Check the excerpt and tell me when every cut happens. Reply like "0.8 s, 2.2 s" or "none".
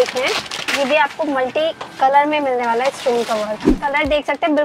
3.7 s